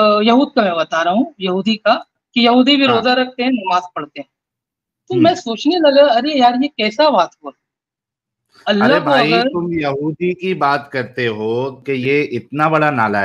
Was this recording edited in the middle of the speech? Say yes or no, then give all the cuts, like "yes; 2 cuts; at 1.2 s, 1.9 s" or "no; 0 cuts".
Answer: yes; 1 cut; at 11.8 s